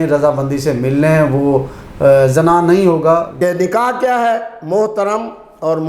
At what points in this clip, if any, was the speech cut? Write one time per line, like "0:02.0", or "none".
0:03.3